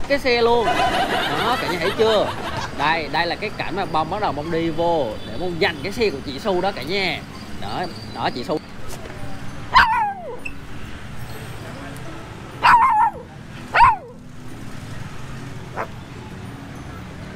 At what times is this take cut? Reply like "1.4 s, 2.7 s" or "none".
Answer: 8.6 s